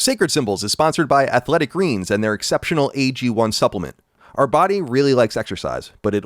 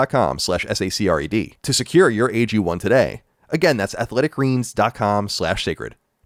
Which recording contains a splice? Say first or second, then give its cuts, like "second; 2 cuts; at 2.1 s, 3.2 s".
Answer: first; 1 cut; at 4.1 s